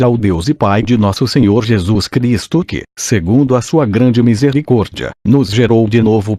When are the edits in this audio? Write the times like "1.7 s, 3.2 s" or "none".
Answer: 4.6 s